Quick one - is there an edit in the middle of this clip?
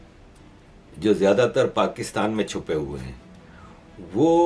no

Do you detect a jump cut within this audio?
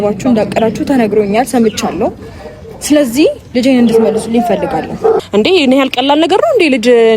yes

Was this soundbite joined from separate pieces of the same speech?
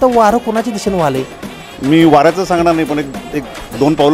no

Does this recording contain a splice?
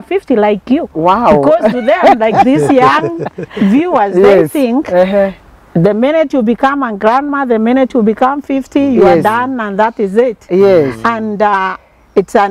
no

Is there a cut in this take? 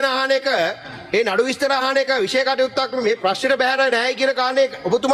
no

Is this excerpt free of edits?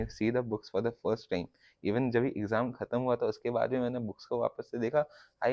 yes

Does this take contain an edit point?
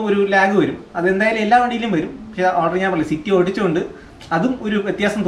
no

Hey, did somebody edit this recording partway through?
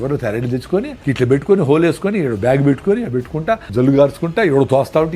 yes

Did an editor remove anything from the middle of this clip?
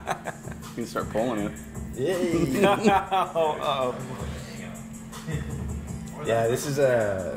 no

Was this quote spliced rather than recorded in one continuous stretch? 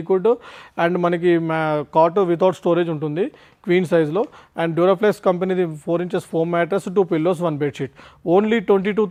no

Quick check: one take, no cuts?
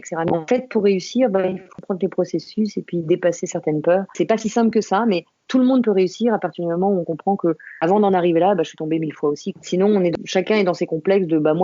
no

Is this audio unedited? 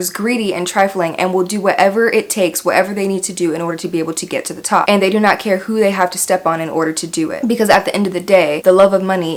yes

